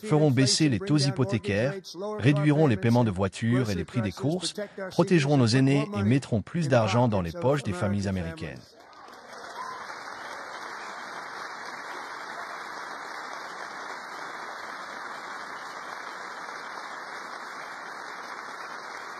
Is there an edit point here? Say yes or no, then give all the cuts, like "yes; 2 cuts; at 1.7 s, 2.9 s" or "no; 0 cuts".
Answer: no; 0 cuts